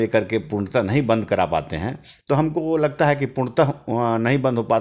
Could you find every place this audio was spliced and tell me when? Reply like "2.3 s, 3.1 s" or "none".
none